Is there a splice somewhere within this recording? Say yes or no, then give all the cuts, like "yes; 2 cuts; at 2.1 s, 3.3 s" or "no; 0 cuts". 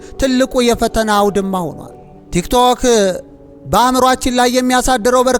no; 0 cuts